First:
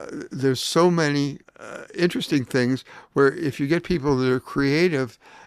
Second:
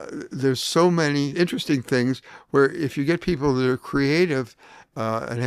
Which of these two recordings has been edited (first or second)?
second